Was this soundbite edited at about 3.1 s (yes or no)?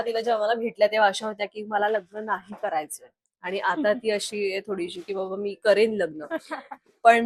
no